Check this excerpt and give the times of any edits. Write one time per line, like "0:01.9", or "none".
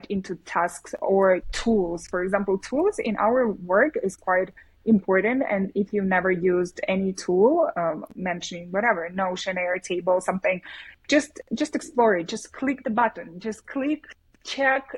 none